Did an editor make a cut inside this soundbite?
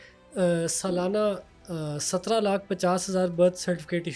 no; 0 cuts

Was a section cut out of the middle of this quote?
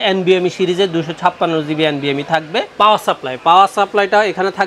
yes; 1 cut; at 2.8 s

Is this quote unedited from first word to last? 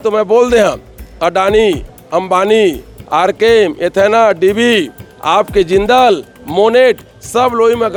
yes; 0 cuts

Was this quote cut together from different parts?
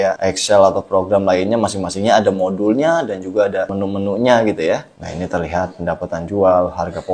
yes; 2 cuts; at 3.8 s, 5.0 s

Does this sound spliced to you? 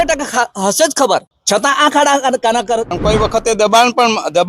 yes; 1 cut; at 2.9 s

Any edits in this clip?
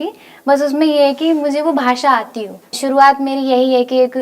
yes; 1 cut; at 2.8 s

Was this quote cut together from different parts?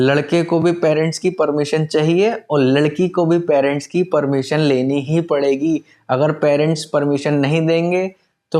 no; 0 cuts

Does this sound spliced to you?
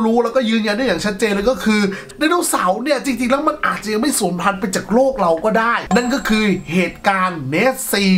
yes; 2 cuts; at 2.1 s, 5.8 s

